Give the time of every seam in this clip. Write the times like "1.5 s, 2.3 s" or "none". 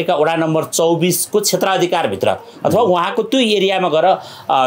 none